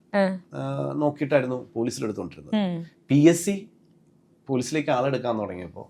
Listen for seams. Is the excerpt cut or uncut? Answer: uncut